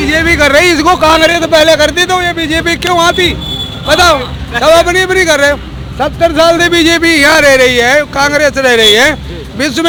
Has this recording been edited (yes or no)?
no